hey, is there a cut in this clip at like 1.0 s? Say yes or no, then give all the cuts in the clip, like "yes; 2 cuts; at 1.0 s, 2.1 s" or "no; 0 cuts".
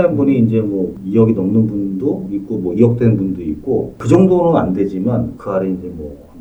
yes; 1 cut; at 1.0 s